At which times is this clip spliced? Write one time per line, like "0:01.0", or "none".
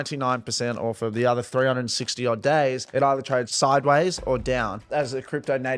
0:03.2
0:04.8